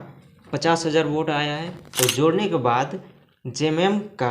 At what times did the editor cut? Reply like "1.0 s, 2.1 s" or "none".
1.8 s